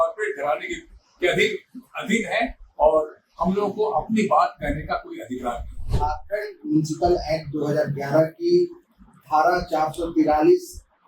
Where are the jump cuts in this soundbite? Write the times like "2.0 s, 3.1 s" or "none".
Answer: 5.9 s